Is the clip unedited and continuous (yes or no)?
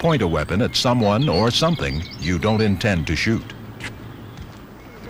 no